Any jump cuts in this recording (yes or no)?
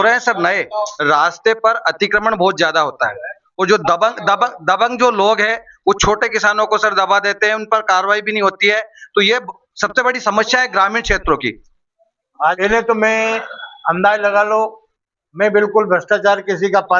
yes